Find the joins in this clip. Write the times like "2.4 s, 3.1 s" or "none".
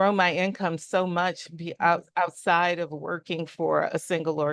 none